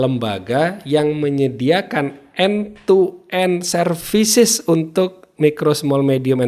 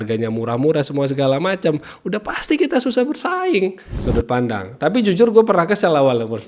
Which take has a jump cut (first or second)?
second